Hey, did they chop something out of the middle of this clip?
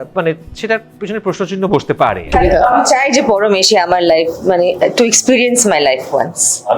yes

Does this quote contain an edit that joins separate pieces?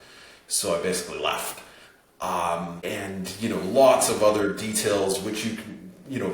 yes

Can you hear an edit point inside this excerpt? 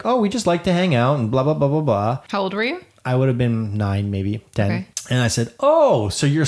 yes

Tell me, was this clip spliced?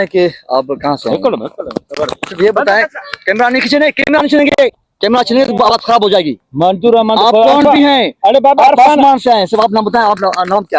no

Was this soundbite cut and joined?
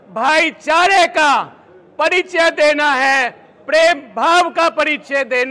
no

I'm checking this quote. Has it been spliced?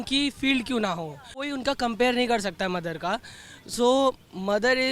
yes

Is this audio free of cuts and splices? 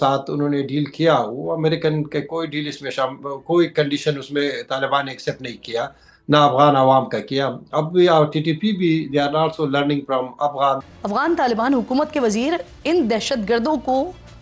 no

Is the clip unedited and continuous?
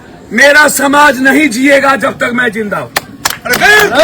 yes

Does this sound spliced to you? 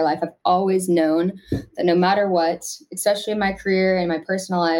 no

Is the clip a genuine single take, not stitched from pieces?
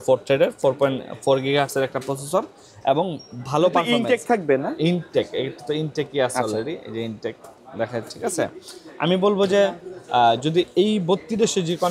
yes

